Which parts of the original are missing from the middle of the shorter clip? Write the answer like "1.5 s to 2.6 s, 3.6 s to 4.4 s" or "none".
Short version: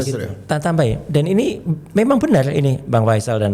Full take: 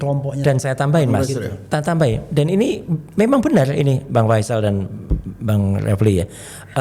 none